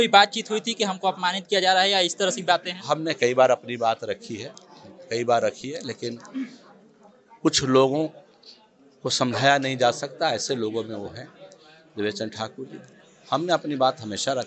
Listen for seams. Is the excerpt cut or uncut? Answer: uncut